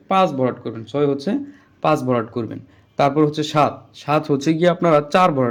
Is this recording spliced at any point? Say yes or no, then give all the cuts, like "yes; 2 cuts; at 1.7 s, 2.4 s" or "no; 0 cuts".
no; 0 cuts